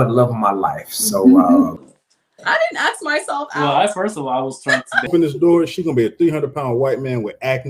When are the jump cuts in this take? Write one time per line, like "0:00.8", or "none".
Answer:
0:01.9
0:05.1